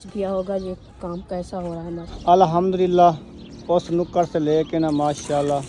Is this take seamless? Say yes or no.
no